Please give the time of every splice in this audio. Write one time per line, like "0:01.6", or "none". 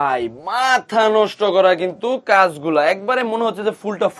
none